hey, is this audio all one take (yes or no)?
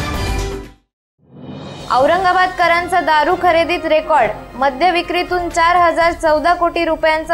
yes